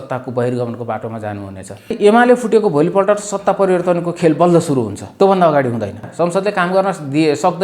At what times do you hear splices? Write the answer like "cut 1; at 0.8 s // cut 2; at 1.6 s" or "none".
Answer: cut 1; at 1.9 s // cut 2; at 5.0 s // cut 3; at 6.1 s